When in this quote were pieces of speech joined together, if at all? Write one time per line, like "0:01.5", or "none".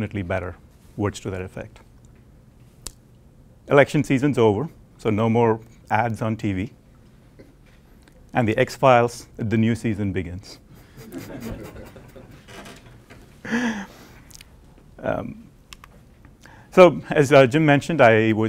0:06.9